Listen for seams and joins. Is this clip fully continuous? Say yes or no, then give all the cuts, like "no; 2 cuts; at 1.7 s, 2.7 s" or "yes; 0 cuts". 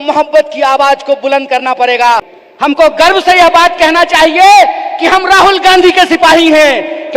no; 1 cut; at 2.3 s